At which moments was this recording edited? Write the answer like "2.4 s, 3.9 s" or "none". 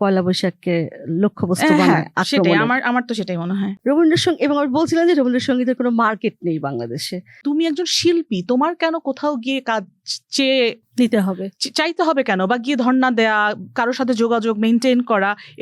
3.7 s, 7.4 s